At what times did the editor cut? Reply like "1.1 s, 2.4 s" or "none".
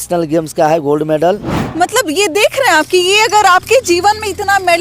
1.6 s